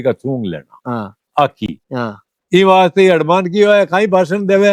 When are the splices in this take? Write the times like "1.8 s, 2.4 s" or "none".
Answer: none